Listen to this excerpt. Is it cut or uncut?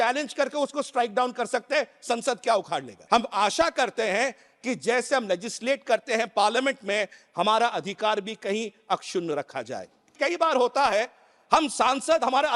cut